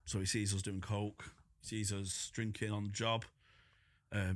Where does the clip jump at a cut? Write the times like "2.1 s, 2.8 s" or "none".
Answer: none